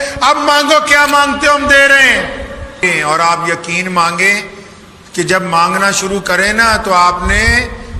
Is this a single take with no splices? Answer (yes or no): no